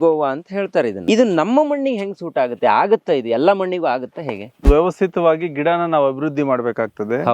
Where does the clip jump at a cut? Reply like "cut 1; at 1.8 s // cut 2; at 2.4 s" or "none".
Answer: cut 1; at 1.0 s // cut 2; at 4.6 s